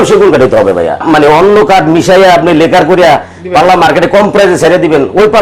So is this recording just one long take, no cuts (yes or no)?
no